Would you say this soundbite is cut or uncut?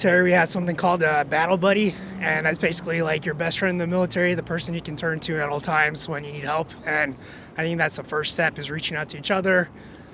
uncut